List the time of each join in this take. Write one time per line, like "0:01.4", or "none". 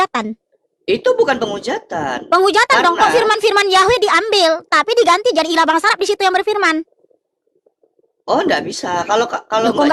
none